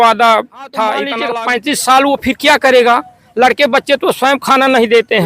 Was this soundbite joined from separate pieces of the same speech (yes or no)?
yes